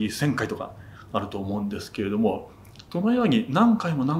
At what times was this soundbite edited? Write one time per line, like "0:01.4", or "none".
none